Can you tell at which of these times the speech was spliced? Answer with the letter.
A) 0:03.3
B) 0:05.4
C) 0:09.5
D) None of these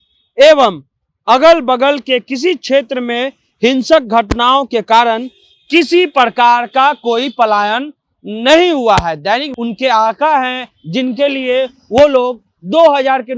C